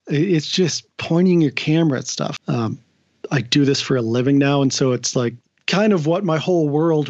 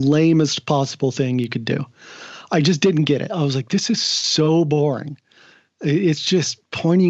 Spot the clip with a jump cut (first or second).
first